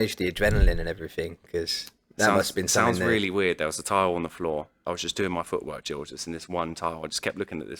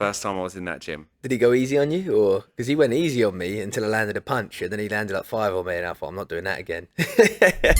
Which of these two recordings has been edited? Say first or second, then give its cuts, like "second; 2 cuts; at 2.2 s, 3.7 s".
first; 1 cut; at 4.8 s